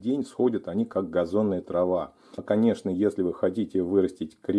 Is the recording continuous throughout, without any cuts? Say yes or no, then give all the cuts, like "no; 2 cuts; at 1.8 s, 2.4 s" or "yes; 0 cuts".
no; 1 cut; at 2.4 s